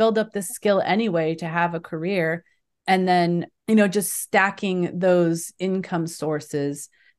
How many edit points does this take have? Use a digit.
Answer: 1